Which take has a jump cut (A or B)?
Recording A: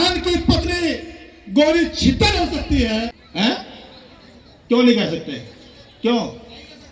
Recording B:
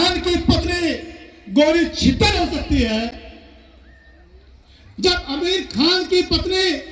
A